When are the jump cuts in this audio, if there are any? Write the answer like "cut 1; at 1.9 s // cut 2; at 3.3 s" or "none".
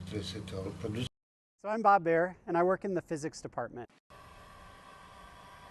cut 1; at 1.1 s // cut 2; at 4.0 s